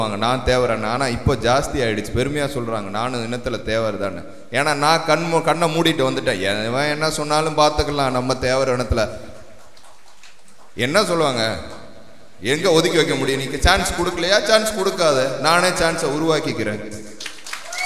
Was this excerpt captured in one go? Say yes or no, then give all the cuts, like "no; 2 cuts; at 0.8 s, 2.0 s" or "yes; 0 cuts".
yes; 0 cuts